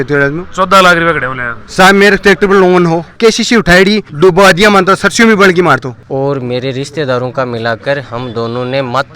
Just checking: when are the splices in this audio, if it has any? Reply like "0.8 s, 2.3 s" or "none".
3.1 s, 4.1 s, 6.0 s